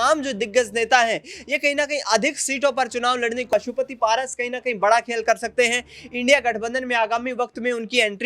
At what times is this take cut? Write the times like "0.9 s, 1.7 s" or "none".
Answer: 3.5 s